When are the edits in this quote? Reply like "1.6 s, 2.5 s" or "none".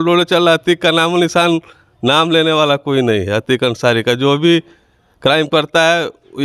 none